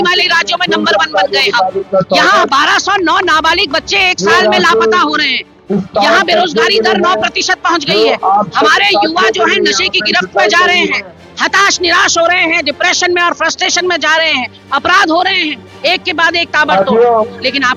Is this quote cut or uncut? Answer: uncut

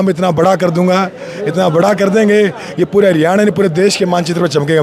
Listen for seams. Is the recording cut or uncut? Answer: uncut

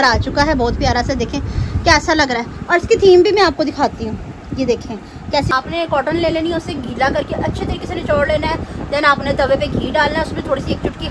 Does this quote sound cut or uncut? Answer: cut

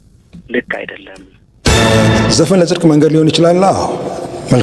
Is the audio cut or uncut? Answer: cut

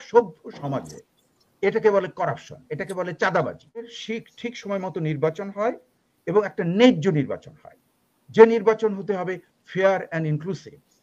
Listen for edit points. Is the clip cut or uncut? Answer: cut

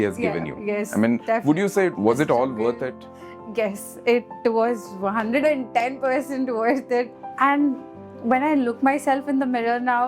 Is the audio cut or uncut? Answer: cut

